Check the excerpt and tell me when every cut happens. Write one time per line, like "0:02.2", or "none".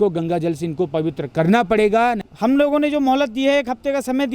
0:02.3